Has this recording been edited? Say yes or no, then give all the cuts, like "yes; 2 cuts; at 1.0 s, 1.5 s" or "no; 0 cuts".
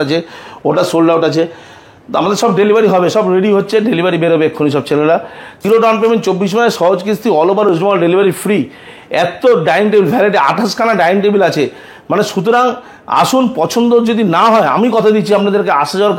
yes; 1 cut; at 5.6 s